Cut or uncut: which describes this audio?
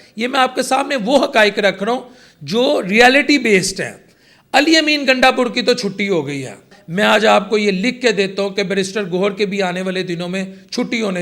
cut